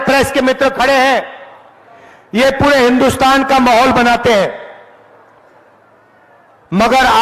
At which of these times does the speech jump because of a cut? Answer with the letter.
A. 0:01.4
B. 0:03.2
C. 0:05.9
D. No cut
D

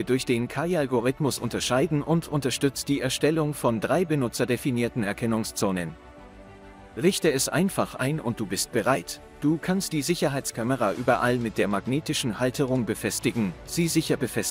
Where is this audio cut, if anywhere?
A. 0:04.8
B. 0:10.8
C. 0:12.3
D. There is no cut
D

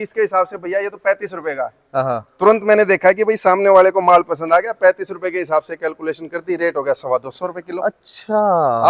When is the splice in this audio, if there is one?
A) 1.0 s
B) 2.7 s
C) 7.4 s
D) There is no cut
D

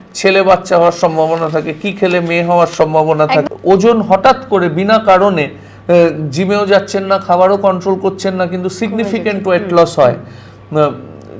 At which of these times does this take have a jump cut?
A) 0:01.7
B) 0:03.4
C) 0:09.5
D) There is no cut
B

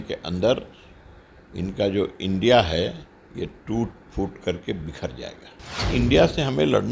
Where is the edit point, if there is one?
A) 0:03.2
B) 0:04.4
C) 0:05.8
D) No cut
C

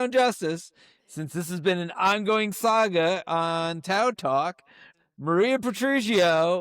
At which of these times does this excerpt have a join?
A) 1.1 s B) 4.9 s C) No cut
B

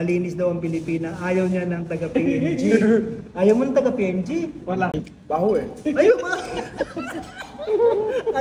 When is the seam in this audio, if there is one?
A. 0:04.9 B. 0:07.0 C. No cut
A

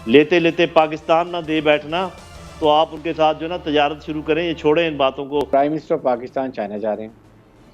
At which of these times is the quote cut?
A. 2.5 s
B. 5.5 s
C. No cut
B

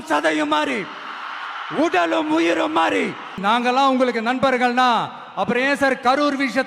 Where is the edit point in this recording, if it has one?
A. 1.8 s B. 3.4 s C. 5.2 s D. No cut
B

